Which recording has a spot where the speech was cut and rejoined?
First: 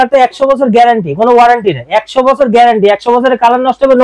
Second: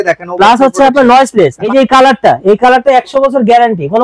second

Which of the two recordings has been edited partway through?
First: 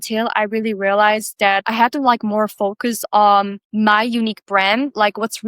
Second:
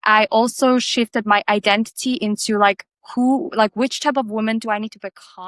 first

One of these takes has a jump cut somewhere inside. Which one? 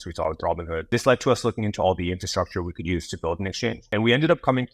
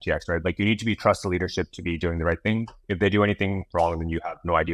first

